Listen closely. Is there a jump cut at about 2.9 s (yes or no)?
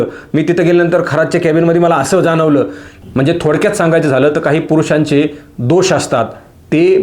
yes